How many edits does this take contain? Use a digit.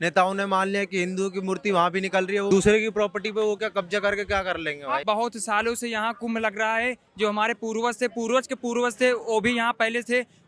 2